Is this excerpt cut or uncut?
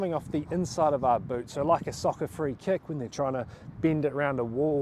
uncut